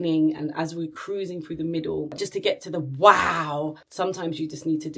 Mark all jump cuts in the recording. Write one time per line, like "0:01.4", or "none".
0:02.2
0:03.8